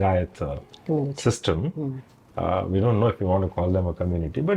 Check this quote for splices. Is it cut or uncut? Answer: uncut